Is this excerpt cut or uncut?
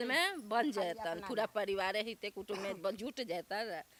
uncut